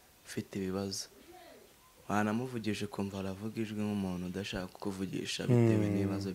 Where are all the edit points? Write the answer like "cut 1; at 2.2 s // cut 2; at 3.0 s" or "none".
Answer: none